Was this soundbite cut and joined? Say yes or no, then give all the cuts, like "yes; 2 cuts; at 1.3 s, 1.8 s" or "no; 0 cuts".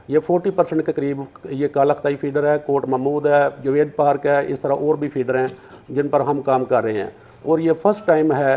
yes; 1 cut; at 3.6 s